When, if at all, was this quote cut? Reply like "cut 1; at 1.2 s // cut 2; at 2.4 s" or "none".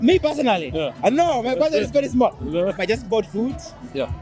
cut 1; at 2.8 s